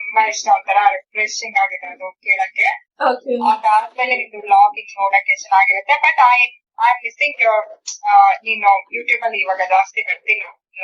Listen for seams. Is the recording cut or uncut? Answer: uncut